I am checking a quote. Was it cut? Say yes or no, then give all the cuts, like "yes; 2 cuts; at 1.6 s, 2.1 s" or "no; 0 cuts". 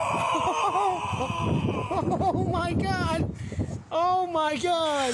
no; 0 cuts